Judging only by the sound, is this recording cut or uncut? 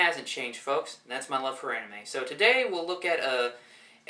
uncut